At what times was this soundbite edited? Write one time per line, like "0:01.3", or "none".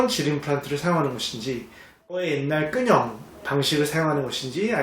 0:02.2